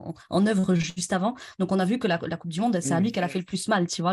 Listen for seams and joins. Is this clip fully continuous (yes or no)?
yes